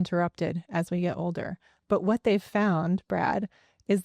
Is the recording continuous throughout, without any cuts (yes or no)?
yes